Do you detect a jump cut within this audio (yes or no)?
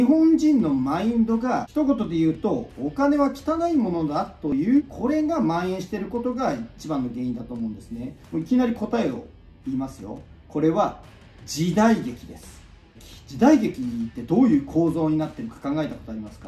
yes